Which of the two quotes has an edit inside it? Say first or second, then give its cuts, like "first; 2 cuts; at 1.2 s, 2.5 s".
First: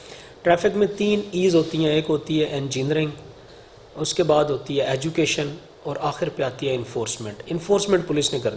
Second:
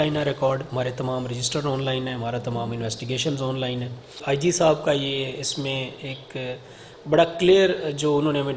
second; 1 cut; at 4.2 s